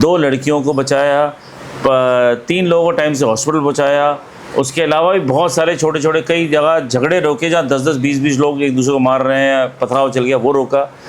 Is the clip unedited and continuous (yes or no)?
yes